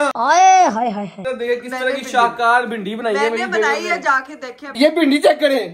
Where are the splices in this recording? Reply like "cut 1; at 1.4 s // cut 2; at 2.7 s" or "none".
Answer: cut 1; at 1.2 s // cut 2; at 4.6 s